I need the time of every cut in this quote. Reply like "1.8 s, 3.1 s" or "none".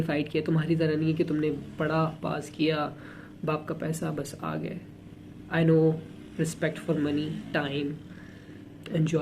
none